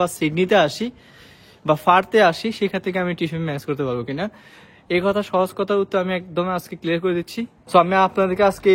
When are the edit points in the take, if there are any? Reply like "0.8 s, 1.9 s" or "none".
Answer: 7.6 s